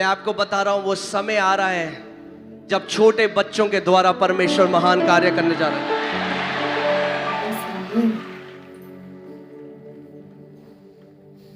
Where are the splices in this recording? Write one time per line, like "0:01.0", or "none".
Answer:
none